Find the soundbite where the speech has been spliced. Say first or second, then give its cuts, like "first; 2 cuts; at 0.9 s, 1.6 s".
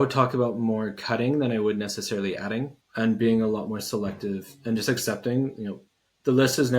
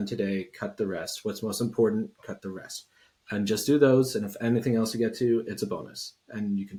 first; 1 cut; at 2.8 s